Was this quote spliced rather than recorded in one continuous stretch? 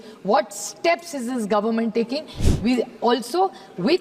yes; 1 cut; at 2.4 s

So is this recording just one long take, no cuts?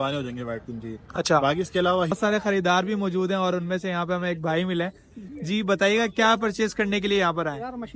no; 1 cut; at 2.1 s

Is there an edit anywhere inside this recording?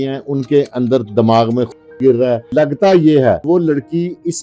yes; 2 cuts; at 2.5 s, 3.4 s

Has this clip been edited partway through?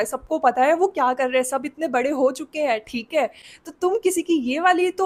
no; 0 cuts

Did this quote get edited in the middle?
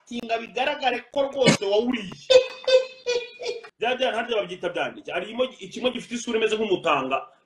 yes; 1 cut; at 3.6 s

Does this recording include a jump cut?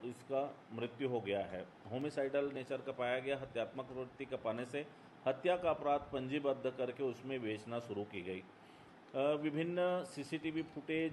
no; 0 cuts

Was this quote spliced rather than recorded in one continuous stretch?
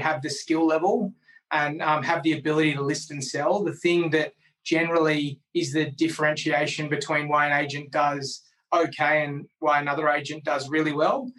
no; 0 cuts

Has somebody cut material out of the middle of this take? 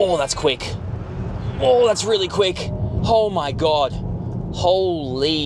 yes; 1 cut; at 2.9 s

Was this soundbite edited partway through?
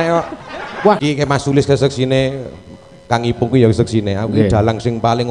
yes; 1 cut; at 1.0 s

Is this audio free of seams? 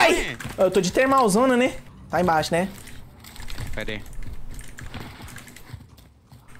no; 1 cut; at 1.9 s

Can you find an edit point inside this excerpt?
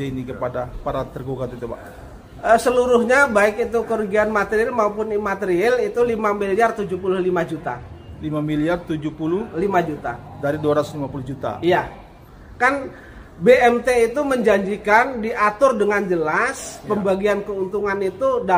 no; 0 cuts

